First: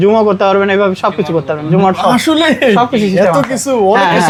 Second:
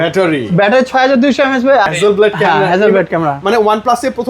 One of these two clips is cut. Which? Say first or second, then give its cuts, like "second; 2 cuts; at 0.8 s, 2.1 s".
second; 1 cut; at 1.9 s